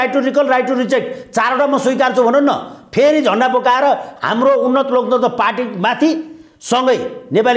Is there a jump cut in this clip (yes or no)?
no